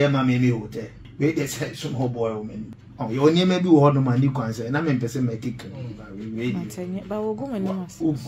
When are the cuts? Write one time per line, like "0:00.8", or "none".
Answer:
0:01.0
0:02.7